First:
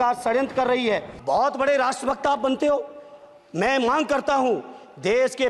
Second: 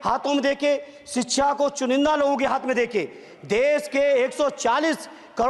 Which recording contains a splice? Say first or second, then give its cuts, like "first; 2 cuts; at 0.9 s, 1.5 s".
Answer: first; 1 cut; at 1.1 s